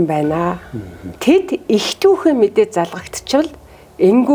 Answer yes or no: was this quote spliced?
no